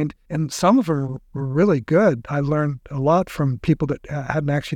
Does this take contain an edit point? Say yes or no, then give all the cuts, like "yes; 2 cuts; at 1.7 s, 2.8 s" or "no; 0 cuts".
no; 0 cuts